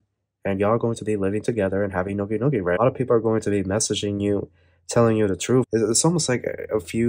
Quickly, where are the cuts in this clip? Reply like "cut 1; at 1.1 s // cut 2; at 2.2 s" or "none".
cut 1; at 2.8 s // cut 2; at 5.7 s